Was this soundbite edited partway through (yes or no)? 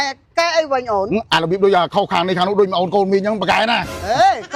no